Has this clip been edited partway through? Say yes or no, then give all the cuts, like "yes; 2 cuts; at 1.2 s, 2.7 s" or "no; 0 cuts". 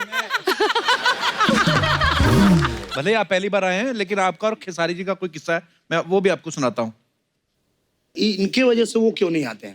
yes; 1 cut; at 2.8 s